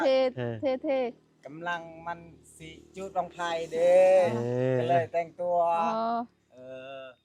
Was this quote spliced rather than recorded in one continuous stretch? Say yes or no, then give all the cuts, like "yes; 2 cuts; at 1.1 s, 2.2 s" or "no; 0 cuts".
no; 0 cuts